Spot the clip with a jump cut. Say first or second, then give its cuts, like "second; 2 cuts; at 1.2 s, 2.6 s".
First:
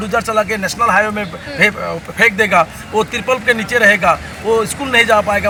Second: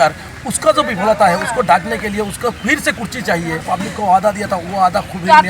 second; 1 cut; at 3.6 s